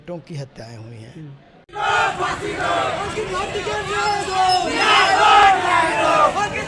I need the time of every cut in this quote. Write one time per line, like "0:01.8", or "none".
none